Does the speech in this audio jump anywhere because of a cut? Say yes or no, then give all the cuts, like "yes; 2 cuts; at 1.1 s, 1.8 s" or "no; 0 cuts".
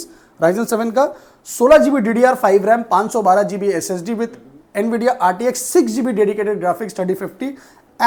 no; 0 cuts